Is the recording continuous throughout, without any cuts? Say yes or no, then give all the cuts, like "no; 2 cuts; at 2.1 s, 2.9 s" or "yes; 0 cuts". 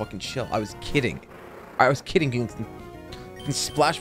yes; 0 cuts